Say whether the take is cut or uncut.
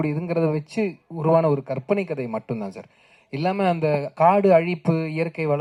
uncut